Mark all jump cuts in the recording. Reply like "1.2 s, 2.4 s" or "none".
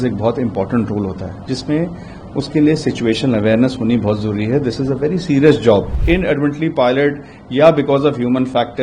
5.9 s